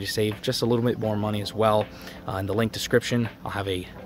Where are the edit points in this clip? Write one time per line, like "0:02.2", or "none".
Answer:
none